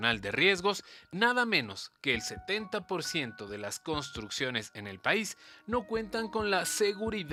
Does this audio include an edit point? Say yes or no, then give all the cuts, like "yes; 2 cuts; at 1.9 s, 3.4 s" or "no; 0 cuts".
no; 0 cuts